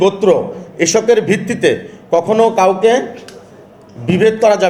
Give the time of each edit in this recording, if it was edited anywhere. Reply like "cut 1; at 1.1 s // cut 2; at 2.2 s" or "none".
none